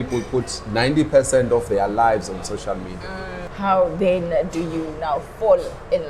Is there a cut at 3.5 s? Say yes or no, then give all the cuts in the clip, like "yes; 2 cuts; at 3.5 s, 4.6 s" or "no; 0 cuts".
yes; 1 cut; at 3.5 s